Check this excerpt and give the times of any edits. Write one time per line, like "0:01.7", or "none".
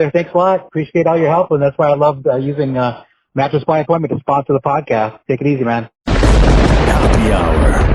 0:06.0